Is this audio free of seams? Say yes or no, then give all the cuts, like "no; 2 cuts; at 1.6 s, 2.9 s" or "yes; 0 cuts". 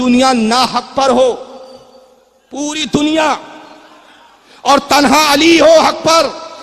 yes; 0 cuts